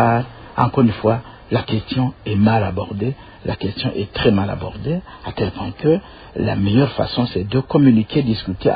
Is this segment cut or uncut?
uncut